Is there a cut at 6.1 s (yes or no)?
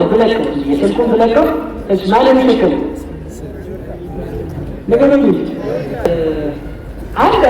yes